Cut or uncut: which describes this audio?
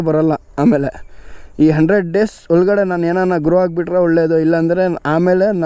uncut